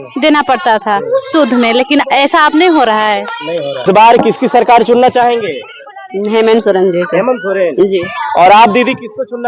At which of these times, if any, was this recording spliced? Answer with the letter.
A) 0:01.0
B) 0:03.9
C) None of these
B